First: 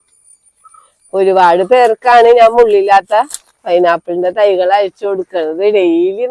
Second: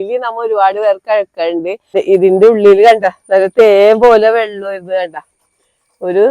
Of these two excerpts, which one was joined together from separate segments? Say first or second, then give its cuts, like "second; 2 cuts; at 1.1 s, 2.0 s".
second; 1 cut; at 2.0 s